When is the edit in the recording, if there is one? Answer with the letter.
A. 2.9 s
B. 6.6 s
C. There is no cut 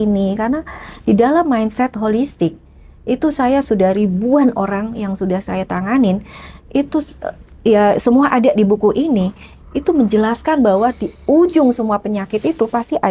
C